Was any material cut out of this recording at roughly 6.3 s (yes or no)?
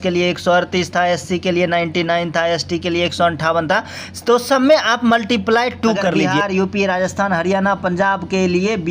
yes